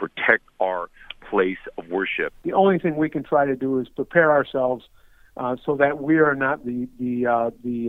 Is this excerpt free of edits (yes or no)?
no